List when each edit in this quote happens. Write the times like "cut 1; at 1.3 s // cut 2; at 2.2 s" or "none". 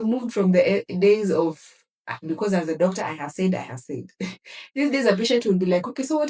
none

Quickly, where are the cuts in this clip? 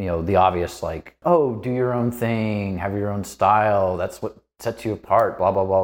cut 1; at 1.1 s

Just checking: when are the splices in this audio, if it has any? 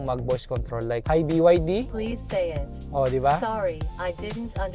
cut 1; at 1.0 s // cut 2; at 1.9 s

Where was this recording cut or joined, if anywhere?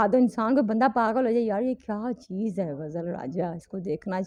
none

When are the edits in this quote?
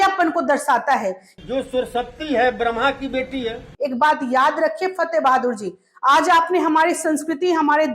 cut 1; at 1.3 s // cut 2; at 3.7 s

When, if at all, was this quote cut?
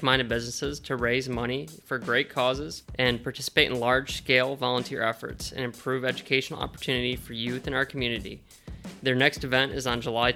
cut 1; at 2.8 s

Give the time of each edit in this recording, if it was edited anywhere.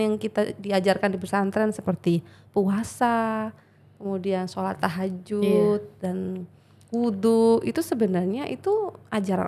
none

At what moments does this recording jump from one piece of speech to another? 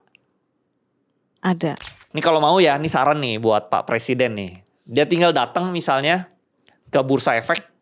cut 1; at 2.1 s

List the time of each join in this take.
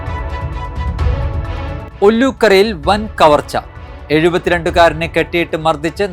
none

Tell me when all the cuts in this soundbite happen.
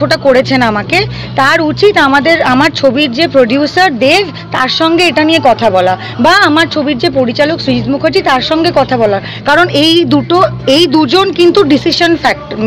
none

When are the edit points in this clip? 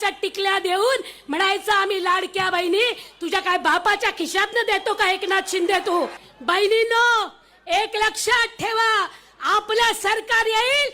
cut 1; at 6.3 s

